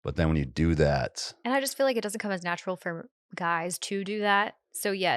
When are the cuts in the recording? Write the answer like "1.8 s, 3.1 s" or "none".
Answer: 1.3 s